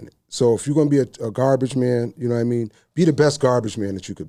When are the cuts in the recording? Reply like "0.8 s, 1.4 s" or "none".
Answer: none